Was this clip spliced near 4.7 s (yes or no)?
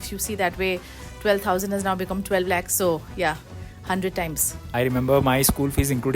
yes